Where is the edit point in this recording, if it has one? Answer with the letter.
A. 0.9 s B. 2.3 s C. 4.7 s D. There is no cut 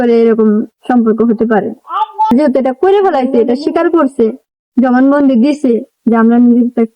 B